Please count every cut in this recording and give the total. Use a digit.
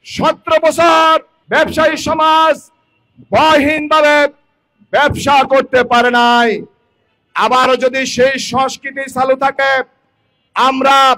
1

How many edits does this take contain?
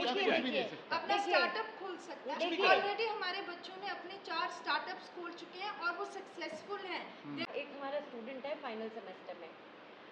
1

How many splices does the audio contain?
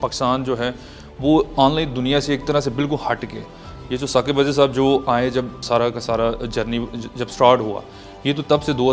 1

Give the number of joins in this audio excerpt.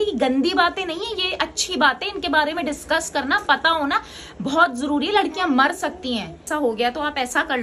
1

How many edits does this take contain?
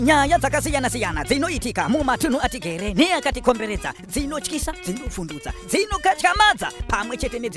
0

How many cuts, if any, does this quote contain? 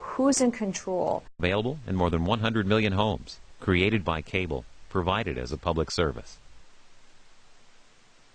0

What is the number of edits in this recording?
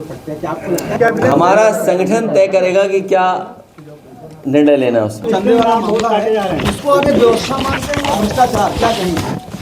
2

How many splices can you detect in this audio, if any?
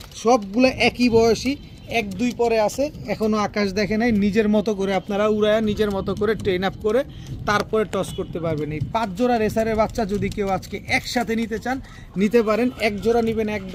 0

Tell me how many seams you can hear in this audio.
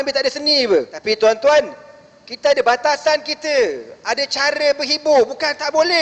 1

